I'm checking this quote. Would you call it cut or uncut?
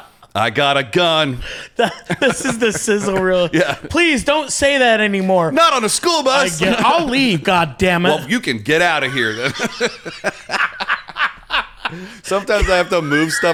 uncut